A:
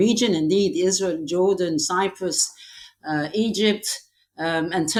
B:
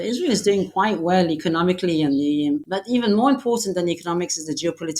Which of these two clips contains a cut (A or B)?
B